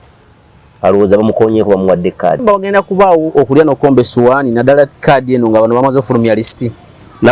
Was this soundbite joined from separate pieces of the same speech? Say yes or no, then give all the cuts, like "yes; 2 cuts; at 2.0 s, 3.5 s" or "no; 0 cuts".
yes; 1 cut; at 2.4 s